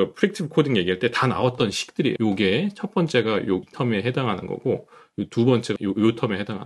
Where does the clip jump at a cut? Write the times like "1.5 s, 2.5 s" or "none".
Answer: 2.2 s, 3.7 s, 5.7 s